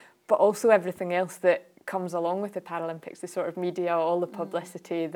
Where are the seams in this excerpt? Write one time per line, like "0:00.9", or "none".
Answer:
none